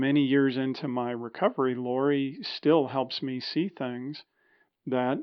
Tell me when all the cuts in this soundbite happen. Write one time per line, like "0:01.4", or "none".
none